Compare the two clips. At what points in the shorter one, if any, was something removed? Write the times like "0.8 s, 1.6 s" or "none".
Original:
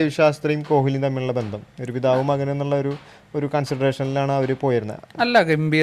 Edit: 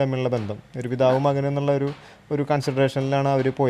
none